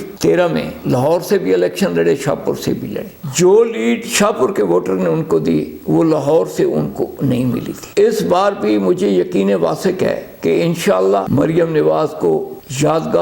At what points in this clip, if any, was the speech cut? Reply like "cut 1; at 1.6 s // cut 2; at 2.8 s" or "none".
none